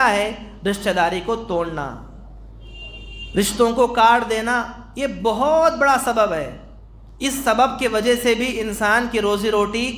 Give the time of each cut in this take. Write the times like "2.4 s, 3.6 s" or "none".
none

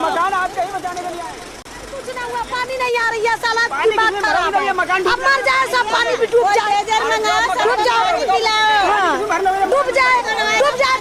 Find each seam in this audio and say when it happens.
1.6 s

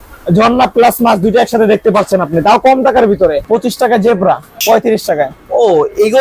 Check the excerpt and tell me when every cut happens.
3.4 s, 4.6 s

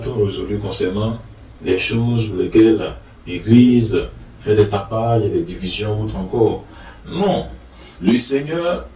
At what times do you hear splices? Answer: none

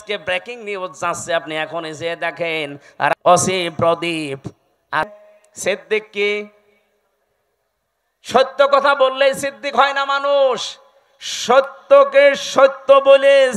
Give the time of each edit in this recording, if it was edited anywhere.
3.1 s, 5.2 s

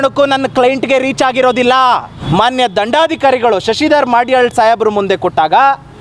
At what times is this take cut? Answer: 2.2 s

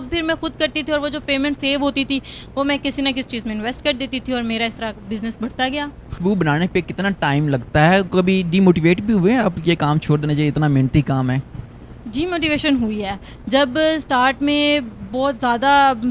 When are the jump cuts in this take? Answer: none

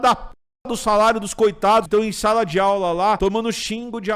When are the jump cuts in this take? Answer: 1.9 s, 3.2 s

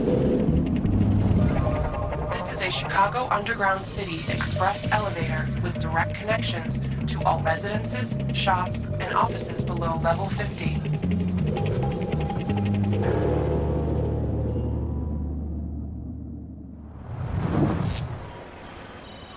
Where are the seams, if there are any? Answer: none

